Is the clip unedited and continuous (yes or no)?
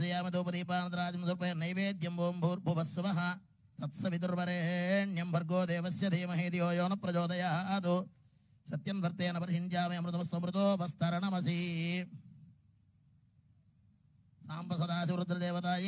no